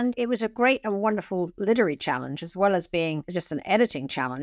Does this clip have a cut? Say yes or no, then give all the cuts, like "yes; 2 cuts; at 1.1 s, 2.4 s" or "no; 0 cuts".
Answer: no; 0 cuts